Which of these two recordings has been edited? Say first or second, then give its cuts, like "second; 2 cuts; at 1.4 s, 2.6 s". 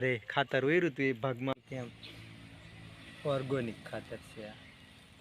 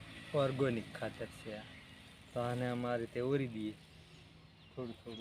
first; 1 cut; at 1.6 s